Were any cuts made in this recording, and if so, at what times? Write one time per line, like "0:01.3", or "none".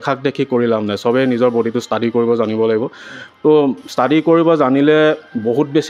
none